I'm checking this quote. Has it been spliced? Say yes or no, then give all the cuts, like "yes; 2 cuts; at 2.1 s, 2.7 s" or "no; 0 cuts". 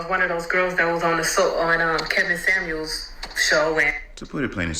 yes; 1 cut; at 2.3 s